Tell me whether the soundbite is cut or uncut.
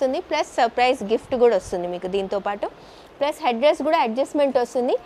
uncut